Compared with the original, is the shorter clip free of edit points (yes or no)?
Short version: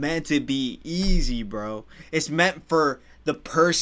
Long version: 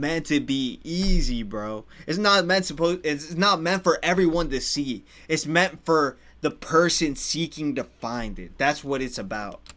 no